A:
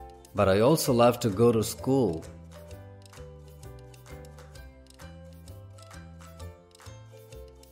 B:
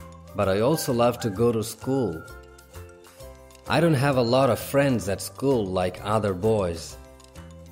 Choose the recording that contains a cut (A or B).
B